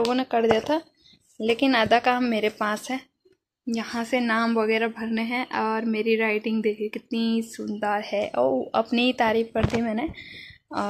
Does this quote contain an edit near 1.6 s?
no; 0 cuts

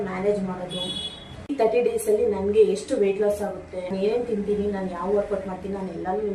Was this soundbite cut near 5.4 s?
no; 2 cuts; at 1.6 s, 3.9 s

